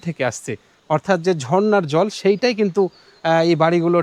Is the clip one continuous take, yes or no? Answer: yes